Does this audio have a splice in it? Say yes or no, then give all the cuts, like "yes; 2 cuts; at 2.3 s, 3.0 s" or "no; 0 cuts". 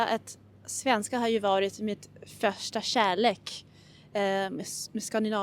no; 0 cuts